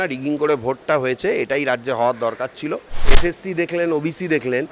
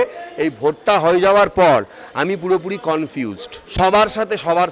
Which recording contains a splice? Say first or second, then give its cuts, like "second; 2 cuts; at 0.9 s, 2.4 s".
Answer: first; 1 cut; at 2.9 s